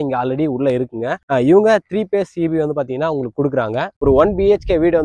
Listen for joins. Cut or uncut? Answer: cut